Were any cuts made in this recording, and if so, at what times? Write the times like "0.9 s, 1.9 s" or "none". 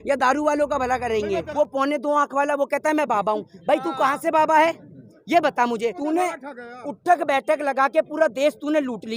1.5 s, 6.0 s